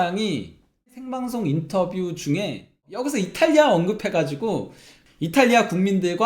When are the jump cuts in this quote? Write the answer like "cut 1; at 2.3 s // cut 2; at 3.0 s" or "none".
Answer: cut 1; at 0.9 s // cut 2; at 2.9 s